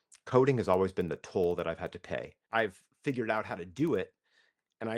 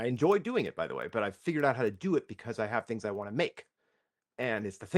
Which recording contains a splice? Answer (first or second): first